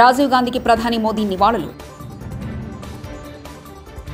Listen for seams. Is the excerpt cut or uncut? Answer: uncut